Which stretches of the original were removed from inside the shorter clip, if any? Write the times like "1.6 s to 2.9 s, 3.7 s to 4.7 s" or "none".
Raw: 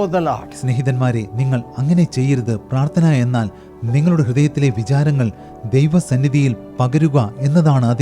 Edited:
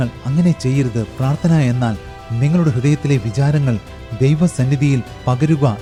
none